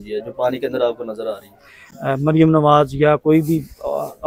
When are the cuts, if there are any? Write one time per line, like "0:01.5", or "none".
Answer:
none